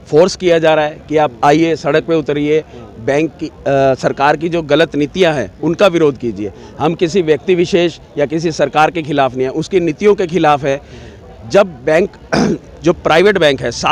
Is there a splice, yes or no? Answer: no